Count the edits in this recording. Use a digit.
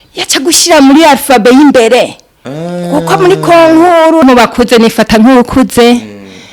1